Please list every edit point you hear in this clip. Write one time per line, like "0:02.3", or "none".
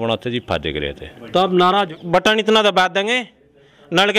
0:01.9